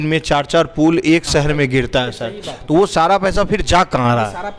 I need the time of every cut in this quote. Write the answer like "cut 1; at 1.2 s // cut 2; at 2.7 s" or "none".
none